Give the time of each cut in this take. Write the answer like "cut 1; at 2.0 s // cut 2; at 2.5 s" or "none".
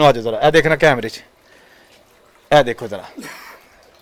none